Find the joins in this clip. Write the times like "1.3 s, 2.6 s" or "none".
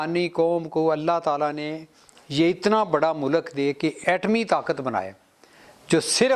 4.0 s